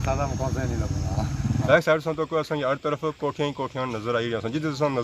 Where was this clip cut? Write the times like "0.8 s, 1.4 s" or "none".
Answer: 1.6 s